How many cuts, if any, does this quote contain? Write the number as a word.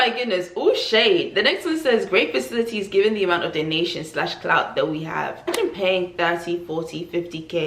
one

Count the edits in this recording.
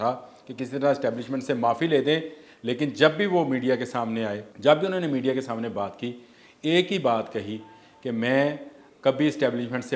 one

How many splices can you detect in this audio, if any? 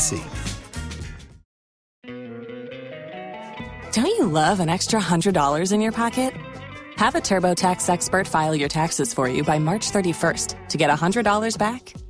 one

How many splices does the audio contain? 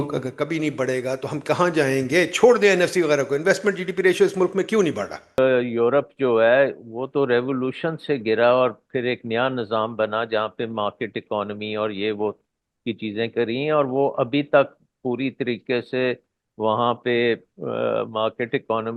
one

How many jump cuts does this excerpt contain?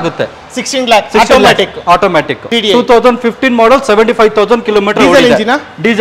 one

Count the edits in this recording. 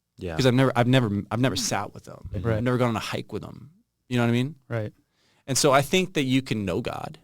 one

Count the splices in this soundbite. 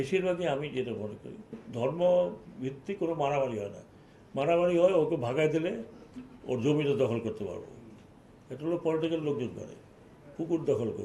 one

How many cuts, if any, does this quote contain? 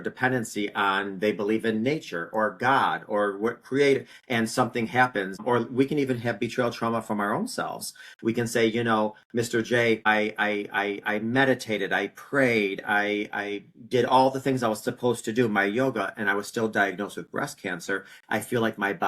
two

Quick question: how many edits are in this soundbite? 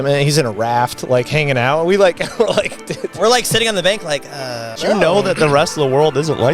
one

